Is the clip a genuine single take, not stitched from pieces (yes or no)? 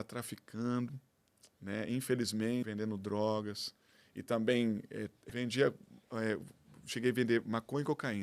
no